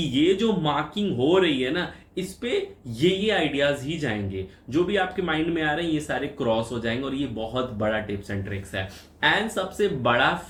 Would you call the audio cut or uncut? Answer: uncut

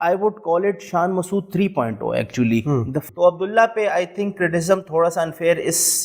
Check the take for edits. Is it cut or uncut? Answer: cut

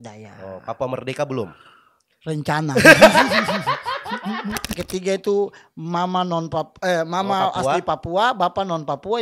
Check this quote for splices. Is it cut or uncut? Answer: cut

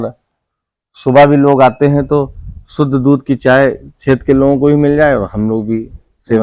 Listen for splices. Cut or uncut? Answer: uncut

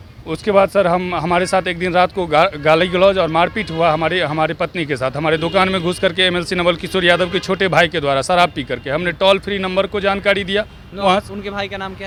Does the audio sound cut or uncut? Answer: uncut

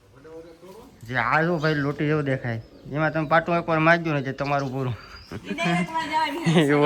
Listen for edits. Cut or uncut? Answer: uncut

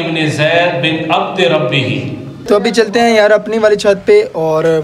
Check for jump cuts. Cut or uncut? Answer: cut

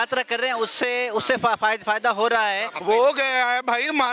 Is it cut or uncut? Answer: cut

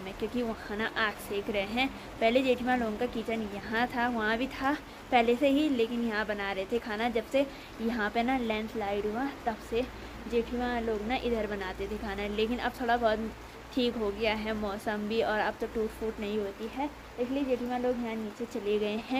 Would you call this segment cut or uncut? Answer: uncut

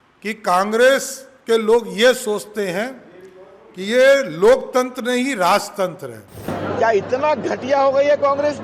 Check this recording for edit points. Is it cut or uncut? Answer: cut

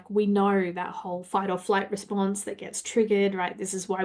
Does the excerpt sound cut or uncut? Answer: uncut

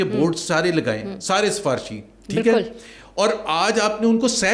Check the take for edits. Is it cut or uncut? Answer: uncut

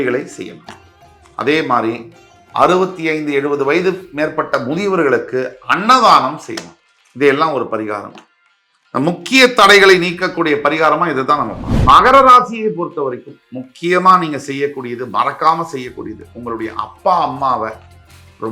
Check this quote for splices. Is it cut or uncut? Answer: cut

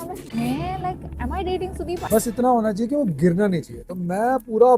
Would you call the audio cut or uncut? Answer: cut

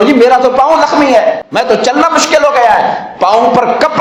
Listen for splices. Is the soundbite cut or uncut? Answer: uncut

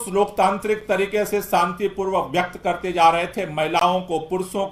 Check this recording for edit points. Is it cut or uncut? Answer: uncut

